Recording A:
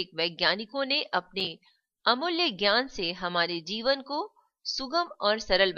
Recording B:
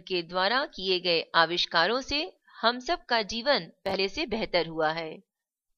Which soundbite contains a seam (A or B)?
B